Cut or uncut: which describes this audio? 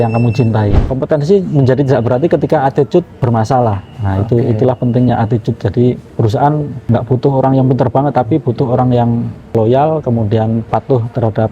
cut